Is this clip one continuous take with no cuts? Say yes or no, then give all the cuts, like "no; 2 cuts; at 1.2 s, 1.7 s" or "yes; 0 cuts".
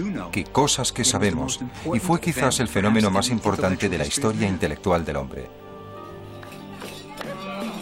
yes; 0 cuts